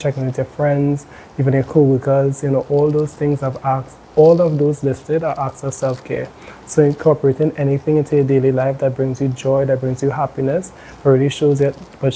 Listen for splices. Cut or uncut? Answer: uncut